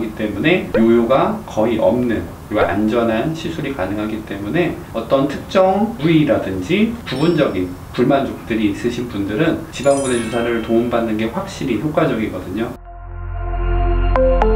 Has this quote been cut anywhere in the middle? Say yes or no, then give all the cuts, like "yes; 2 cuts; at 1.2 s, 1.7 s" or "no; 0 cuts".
yes; 5 cuts; at 2.3 s, 4.8 s, 7.0 s, 9.7 s, 12.8 s